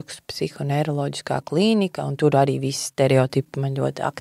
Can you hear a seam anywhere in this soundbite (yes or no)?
no